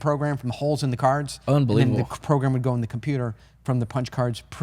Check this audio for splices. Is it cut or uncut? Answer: uncut